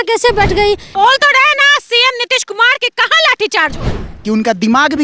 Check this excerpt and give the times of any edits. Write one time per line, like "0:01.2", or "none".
0:00.9
0:04.2